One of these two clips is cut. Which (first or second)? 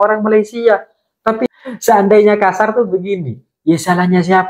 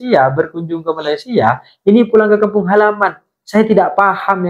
first